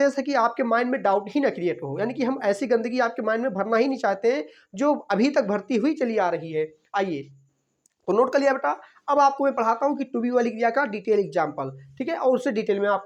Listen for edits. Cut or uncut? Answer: uncut